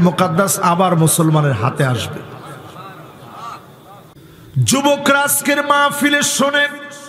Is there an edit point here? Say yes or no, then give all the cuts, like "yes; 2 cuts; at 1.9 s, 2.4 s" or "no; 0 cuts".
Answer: yes; 1 cut; at 4.2 s